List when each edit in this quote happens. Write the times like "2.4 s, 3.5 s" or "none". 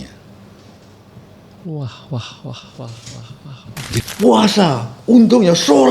4.0 s